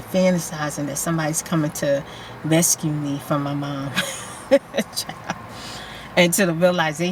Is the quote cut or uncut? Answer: uncut